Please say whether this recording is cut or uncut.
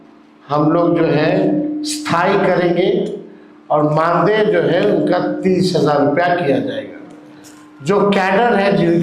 uncut